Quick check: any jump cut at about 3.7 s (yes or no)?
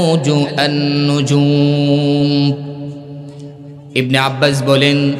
yes